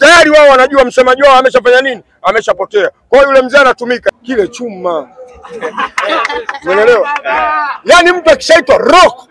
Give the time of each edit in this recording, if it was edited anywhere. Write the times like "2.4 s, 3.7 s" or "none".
4.2 s